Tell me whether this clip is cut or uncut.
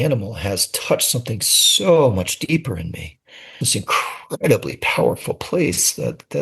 cut